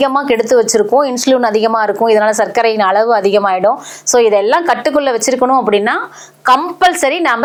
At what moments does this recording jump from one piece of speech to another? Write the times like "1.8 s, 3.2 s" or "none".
none